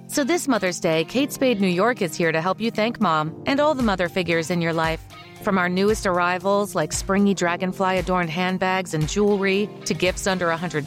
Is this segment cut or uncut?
uncut